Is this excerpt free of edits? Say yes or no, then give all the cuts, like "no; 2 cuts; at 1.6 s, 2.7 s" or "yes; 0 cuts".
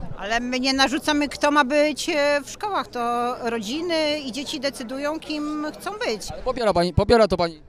yes; 0 cuts